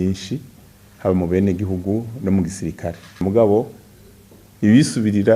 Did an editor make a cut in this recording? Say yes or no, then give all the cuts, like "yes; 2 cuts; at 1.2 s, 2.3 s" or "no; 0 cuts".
yes; 1 cut; at 3.2 s